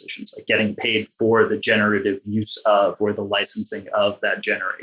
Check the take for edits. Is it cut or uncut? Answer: uncut